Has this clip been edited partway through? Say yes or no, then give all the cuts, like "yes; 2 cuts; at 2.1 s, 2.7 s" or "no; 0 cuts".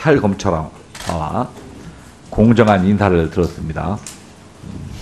no; 0 cuts